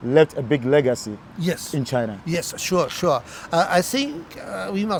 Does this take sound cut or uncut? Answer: uncut